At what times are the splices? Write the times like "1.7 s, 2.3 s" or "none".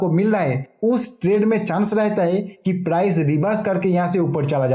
none